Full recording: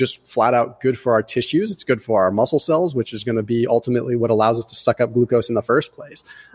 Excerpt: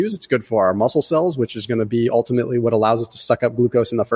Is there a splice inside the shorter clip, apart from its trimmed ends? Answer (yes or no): no